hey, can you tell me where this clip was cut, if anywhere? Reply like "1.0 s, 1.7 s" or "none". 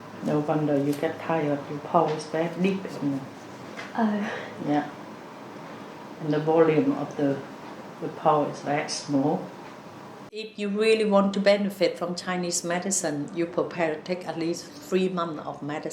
10.5 s